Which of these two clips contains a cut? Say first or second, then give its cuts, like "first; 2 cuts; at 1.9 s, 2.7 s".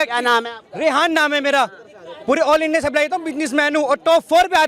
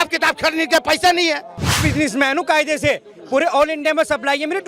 second; 1 cut; at 1.8 s